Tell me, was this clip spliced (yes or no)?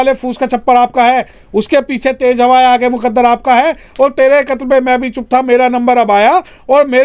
no